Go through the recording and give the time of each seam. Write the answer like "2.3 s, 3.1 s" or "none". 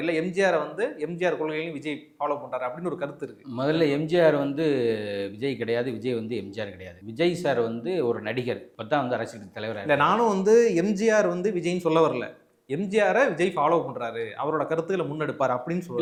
none